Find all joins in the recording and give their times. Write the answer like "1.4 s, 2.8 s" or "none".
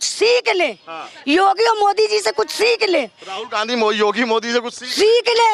none